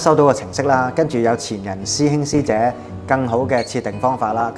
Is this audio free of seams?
yes; 0 cuts

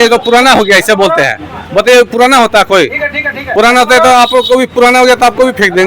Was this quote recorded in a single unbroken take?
yes; 0 cuts

